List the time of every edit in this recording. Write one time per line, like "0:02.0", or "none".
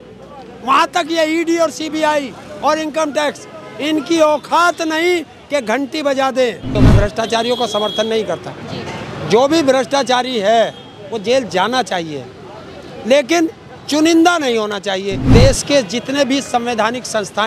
0:06.8
0:15.3